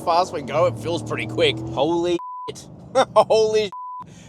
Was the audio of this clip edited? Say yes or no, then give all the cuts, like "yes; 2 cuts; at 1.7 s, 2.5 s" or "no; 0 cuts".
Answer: yes; 1 cut; at 1.7 s